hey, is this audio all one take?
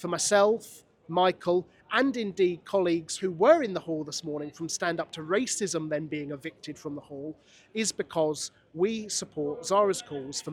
yes; 0 cuts

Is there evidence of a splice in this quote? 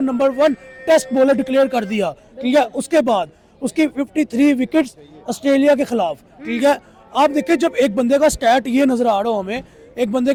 no; 0 cuts

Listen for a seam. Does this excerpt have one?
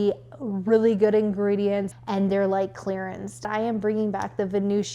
yes; 2 cuts; at 1.9 s, 3.5 s

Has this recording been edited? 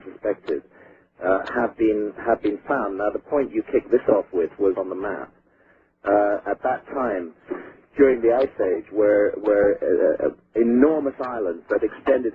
no; 0 cuts

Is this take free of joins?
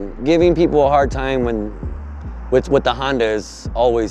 yes; 0 cuts

